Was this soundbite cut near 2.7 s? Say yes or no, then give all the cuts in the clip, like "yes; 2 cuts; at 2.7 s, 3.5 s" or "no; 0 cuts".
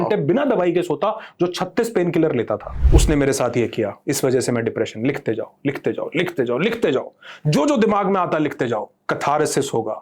yes; 1 cut; at 2.7 s